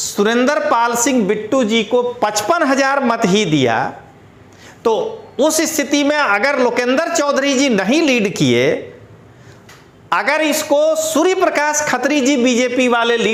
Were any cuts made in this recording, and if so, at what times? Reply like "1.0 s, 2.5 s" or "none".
none